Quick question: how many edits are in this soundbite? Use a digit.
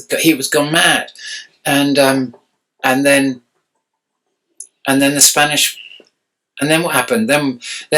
0